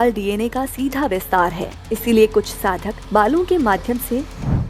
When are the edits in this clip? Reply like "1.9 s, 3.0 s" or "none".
1.7 s, 2.9 s